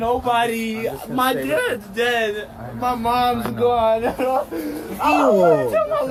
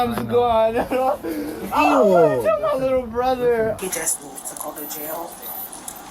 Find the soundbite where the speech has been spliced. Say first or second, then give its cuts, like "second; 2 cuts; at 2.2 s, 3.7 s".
second; 1 cut; at 3.8 s